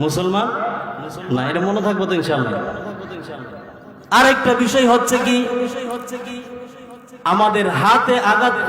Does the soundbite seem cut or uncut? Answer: uncut